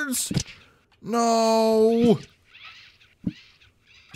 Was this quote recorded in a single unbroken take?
yes; 0 cuts

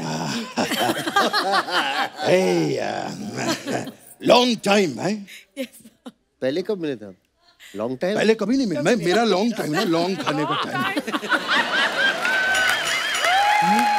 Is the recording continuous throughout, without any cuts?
yes; 0 cuts

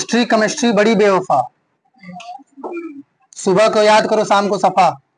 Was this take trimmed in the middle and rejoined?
no; 0 cuts

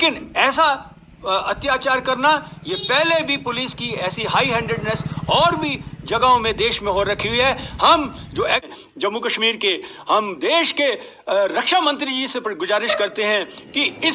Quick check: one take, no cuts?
no; 1 cut; at 8.7 s

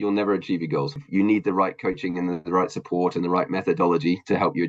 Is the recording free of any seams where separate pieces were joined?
no; 1 cut; at 1.0 s

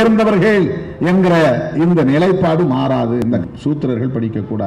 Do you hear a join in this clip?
yes; 1 cut; at 3.3 s

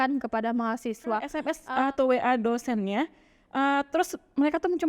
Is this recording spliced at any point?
yes; 1 cut; at 1.3 s

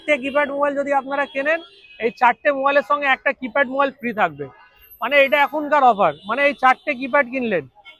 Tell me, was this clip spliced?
no; 0 cuts

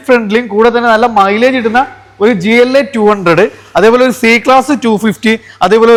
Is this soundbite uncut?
yes; 0 cuts

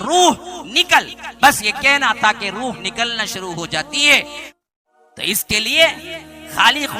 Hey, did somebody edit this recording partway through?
yes; 1 cut; at 4.4 s

